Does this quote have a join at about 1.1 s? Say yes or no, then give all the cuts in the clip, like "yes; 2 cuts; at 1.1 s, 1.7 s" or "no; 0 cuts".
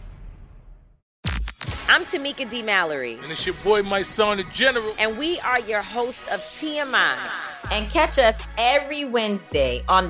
yes; 1 cut; at 1.1 s